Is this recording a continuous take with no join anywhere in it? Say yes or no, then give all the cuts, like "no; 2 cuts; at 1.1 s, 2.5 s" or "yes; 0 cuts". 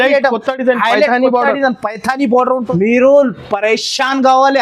no; 1 cut; at 2.7 s